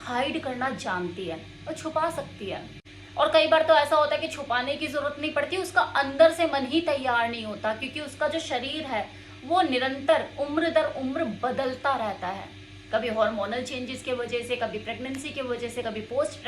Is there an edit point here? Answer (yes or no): no